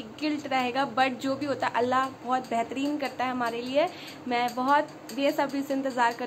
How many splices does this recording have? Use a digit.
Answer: 0